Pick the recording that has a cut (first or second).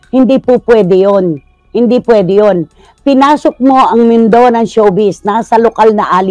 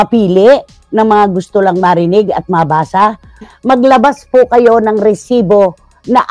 second